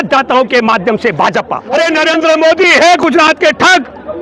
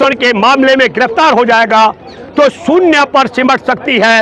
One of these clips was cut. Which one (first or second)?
first